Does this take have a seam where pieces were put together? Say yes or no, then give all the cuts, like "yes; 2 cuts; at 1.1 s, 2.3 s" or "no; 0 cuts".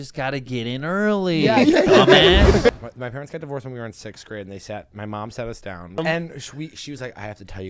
yes; 2 cuts; at 2.7 s, 6.0 s